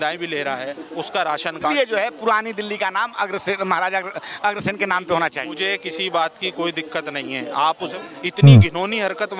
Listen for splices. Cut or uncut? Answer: cut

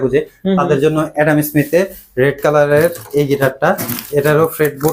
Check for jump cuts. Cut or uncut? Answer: uncut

